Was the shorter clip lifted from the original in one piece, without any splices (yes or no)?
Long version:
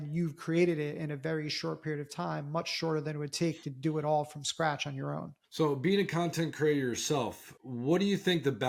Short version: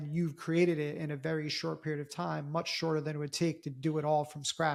yes